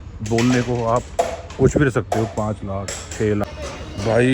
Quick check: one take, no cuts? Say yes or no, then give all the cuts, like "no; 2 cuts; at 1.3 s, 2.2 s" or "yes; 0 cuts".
no; 1 cut; at 3.4 s